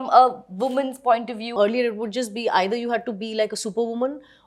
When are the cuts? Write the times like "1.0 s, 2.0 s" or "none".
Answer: 1.5 s